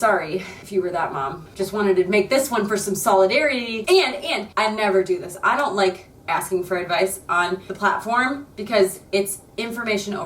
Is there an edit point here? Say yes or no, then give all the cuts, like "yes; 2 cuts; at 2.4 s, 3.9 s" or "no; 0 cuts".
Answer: yes; 2 cuts; at 1.5 s, 3.8 s